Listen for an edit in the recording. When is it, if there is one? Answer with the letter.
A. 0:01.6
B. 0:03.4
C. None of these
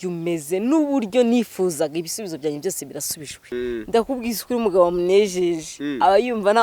B